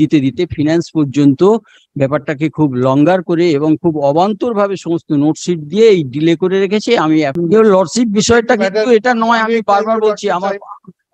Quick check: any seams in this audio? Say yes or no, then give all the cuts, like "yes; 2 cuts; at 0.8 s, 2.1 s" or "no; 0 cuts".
yes; 1 cut; at 7.3 s